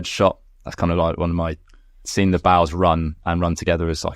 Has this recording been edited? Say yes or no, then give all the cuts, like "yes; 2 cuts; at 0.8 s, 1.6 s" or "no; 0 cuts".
no; 0 cuts